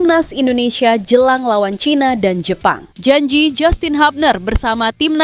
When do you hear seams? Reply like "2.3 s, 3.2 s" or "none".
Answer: 2.9 s